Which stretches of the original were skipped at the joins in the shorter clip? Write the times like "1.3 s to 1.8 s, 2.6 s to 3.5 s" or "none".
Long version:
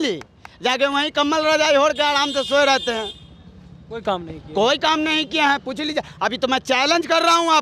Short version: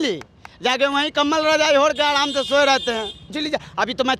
3.3 s to 5.7 s

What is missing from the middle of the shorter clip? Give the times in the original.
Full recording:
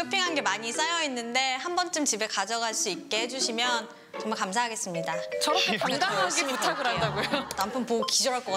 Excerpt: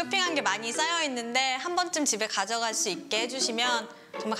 none

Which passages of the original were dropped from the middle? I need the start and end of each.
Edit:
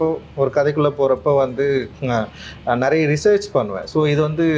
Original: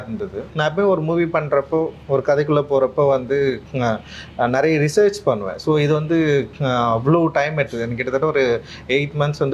none

